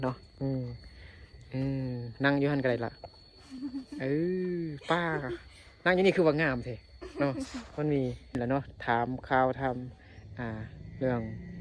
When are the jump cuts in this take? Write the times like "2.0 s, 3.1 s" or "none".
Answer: 8.4 s